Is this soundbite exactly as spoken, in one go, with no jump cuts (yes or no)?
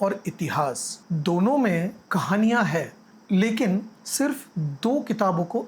no